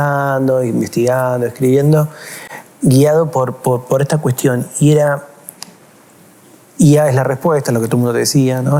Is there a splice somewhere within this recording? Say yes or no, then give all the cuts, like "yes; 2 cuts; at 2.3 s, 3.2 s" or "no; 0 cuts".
no; 0 cuts